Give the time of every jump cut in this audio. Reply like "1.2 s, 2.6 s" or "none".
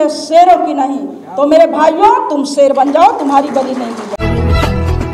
4.1 s